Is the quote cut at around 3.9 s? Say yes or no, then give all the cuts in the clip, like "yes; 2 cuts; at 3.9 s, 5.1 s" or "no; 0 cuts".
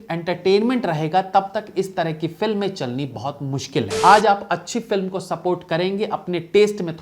yes; 1 cut; at 3.9 s